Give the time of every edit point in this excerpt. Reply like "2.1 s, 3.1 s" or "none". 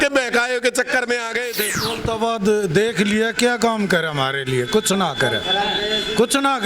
1.7 s

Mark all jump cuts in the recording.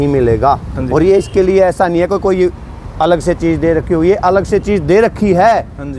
none

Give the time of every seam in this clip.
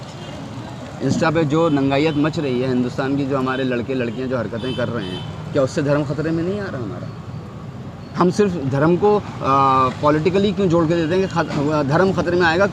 none

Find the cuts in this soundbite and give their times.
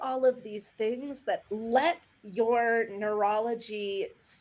1.5 s

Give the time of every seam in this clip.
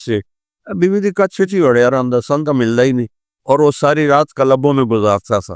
none

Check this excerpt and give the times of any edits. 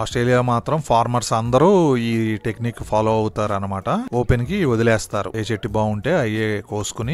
4.1 s, 5.3 s

